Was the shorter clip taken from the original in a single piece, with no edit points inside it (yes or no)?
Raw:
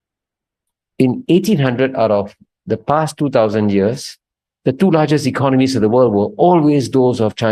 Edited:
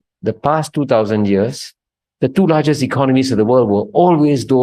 yes